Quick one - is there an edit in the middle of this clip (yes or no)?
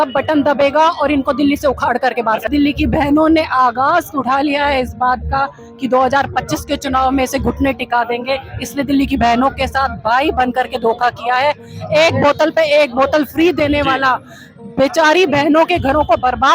yes